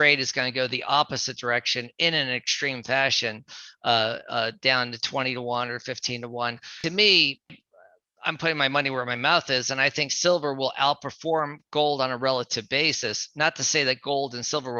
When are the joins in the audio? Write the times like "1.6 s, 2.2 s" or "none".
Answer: 6.7 s, 7.5 s